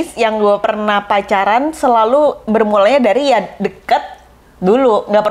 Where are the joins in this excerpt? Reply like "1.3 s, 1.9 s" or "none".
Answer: none